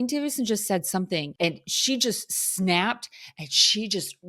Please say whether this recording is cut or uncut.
cut